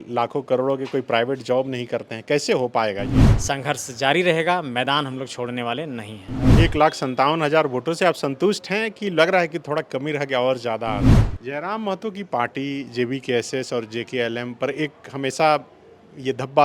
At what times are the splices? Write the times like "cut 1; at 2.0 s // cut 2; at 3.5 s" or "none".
cut 1; at 3.3 s // cut 2; at 6.5 s // cut 3; at 11.2 s